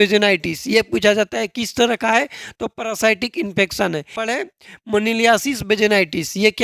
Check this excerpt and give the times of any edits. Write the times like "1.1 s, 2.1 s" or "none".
4.1 s

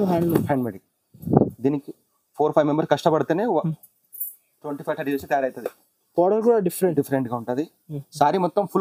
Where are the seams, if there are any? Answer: none

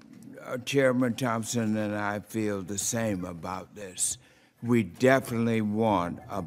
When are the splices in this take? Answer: 3.0 s

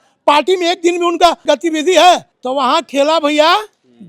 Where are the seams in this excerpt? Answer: 1.4 s, 2.3 s

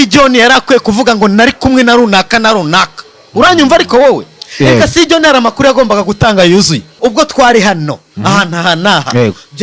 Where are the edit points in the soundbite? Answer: 6.9 s

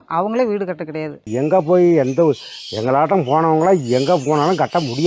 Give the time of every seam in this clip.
1.2 s

